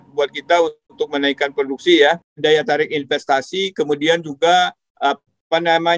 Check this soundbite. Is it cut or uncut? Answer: cut